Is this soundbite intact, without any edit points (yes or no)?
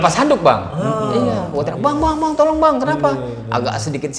yes